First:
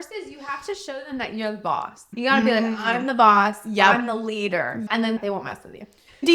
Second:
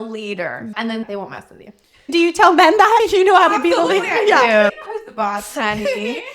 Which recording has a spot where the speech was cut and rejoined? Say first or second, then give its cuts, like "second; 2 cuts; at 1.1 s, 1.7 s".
second; 1 cut; at 4.8 s